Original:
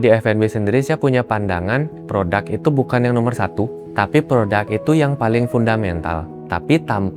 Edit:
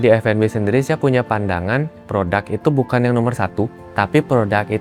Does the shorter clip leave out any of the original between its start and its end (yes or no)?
no